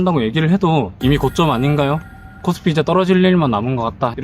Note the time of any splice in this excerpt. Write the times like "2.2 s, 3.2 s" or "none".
0.9 s